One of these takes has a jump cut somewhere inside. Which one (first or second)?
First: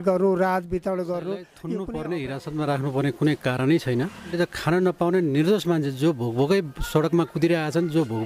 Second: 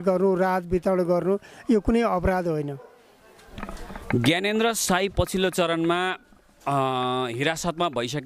first